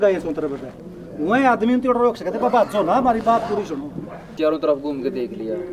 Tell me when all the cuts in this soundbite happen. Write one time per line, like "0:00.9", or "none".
0:04.3

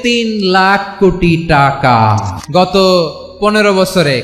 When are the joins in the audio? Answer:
0:02.3

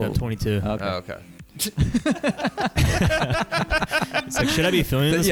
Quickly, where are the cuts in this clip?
none

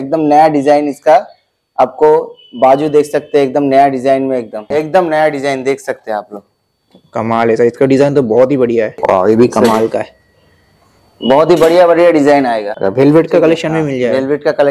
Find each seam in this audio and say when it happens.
0:04.6
0:09.0
0:12.7

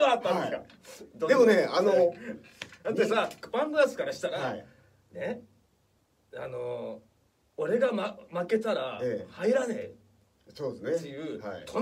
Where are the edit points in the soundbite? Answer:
none

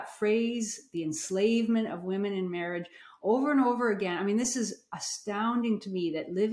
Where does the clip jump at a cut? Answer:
none

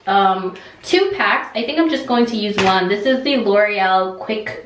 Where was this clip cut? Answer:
none

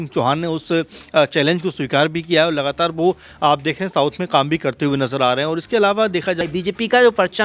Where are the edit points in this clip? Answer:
0:06.4

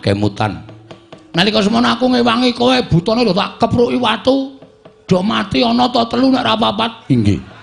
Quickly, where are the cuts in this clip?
none

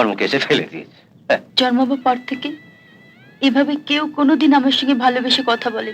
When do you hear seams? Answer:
0:01.5

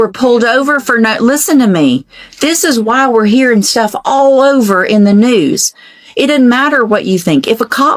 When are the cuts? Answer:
none

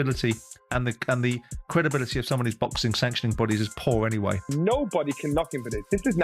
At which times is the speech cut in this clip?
0:04.5

